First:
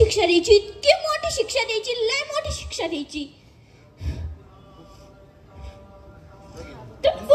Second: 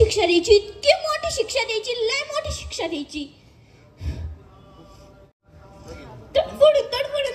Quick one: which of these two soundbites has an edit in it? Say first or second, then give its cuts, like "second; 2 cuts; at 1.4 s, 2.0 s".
second; 1 cut; at 5.4 s